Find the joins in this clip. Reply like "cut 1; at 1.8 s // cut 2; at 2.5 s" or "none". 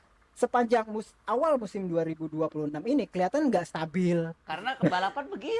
cut 1; at 4.4 s